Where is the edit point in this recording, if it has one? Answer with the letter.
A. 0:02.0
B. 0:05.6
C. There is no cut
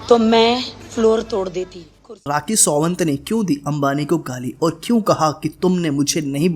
A